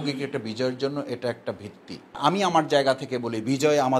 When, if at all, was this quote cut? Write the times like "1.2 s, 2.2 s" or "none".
2.2 s